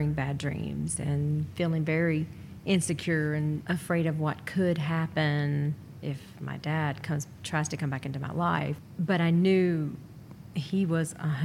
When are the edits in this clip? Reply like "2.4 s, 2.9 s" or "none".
3.6 s, 8.8 s

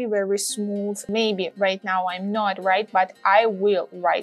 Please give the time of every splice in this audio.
1.0 s

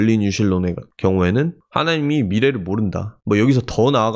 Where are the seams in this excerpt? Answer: 1.6 s, 3.1 s

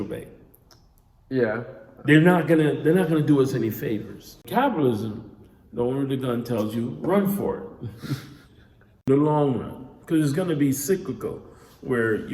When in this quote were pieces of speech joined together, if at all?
4.5 s, 9.1 s

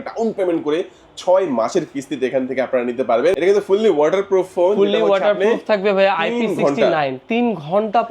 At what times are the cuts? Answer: 3.4 s

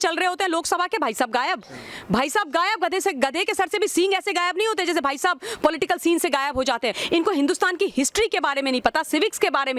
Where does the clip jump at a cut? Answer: 7.0 s

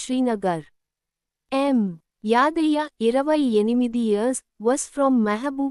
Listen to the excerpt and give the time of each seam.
1.3 s

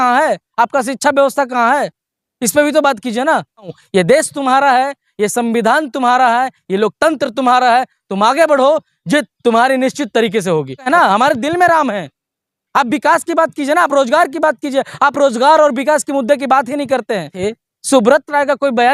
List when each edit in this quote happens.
3.8 s, 10.9 s, 17.3 s

